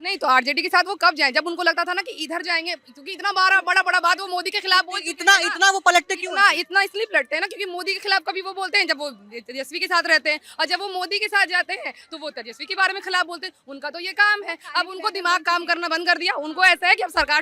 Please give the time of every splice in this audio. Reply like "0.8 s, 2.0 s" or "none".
none

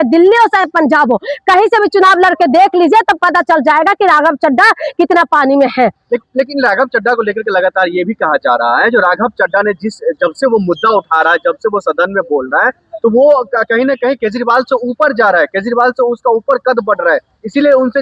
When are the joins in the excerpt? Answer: none

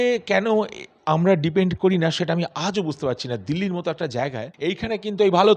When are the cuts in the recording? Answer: 4.5 s

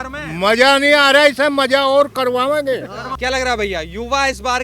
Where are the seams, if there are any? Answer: none

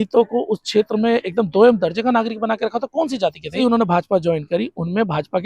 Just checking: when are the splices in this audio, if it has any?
3.6 s

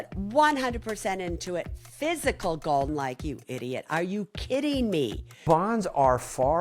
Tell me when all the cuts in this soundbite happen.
2.9 s, 5.4 s

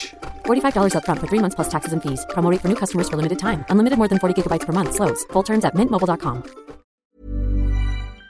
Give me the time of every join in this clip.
7.0 s

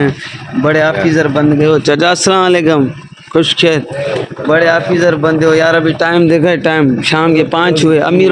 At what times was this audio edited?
none

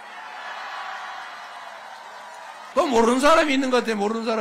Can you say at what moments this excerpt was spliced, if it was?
2.7 s

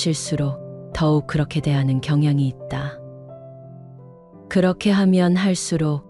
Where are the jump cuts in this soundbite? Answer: 3.1 s, 4.5 s

